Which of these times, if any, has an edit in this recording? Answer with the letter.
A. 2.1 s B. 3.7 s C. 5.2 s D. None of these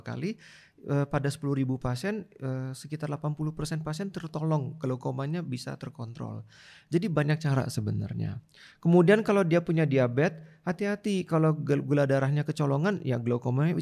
D